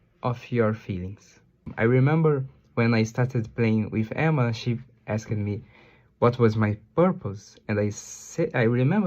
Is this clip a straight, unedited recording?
no; 1 cut; at 1.7 s

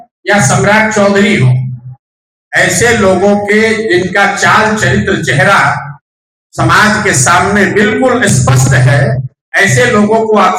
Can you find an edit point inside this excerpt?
no; 0 cuts

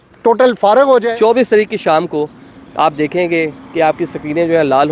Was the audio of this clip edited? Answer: yes; 1 cut; at 1.1 s

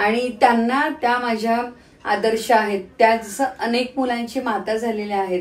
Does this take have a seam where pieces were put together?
no; 0 cuts

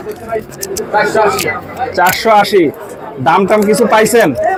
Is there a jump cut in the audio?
no; 0 cuts

